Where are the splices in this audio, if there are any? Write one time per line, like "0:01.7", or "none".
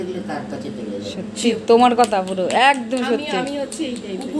none